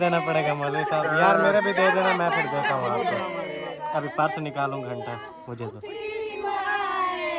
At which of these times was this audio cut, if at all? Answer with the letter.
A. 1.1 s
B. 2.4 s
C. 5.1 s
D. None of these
D